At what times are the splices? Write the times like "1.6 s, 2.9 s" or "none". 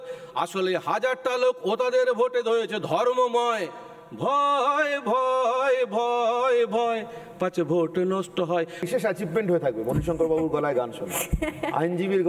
8.8 s